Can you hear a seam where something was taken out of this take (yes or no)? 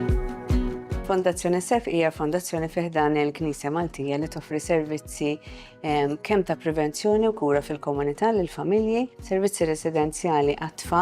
yes